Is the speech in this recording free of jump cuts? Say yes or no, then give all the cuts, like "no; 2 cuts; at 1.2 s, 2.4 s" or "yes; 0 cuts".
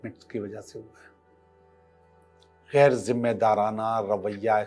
yes; 0 cuts